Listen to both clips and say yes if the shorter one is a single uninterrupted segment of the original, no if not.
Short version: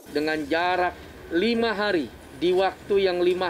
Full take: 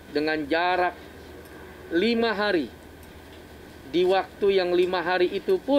no